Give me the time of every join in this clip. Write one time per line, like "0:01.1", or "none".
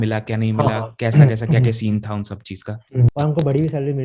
0:03.1